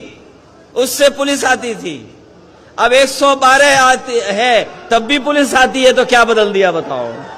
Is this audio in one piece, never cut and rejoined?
yes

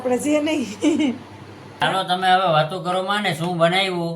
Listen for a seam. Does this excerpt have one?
yes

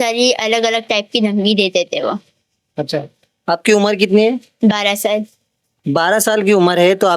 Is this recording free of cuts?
yes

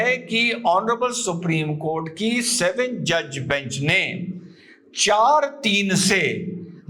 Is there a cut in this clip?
no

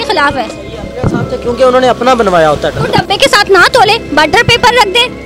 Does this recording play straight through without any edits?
yes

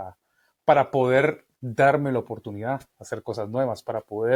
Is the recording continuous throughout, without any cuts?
yes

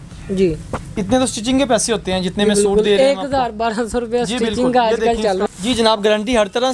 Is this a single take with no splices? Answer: no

